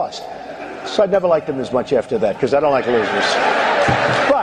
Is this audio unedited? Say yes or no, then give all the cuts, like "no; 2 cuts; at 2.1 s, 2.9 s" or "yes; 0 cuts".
yes; 0 cuts